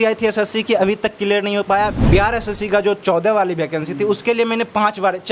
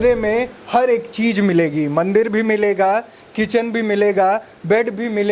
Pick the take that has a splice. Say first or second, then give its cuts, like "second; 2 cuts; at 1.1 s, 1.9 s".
first; 1 cut; at 2.0 s